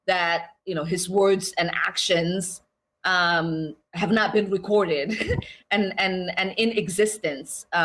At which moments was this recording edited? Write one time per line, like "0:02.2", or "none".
0:06.0